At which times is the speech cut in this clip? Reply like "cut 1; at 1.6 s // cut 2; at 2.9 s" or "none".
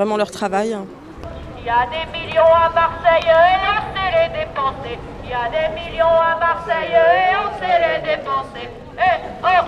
none